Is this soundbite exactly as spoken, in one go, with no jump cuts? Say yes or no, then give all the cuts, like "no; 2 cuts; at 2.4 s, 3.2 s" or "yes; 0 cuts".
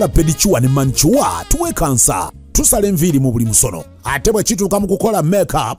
yes; 0 cuts